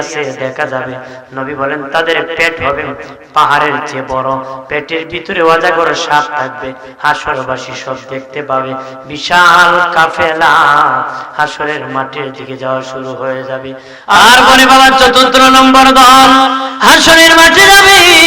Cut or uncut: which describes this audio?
cut